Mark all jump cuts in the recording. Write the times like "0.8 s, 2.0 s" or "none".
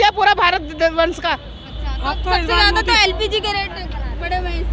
none